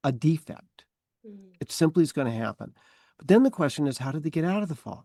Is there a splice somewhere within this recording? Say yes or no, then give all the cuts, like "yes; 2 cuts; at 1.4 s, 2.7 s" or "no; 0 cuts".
no; 0 cuts